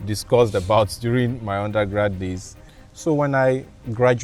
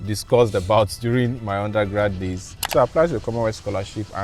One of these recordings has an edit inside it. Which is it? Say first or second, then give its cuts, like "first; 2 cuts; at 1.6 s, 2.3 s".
second; 1 cut; at 2.5 s